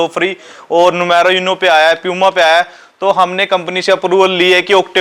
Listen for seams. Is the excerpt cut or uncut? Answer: uncut